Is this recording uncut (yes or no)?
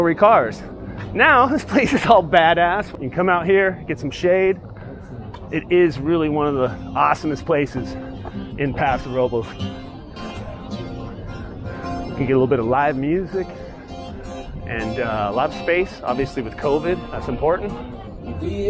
no